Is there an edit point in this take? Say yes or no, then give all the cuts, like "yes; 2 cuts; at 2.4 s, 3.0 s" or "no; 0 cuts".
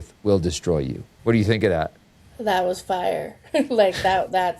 yes; 1 cut; at 1.0 s